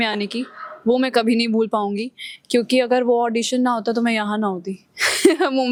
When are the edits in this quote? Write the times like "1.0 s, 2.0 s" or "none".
none